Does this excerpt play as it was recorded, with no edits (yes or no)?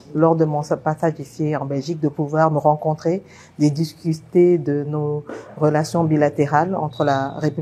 yes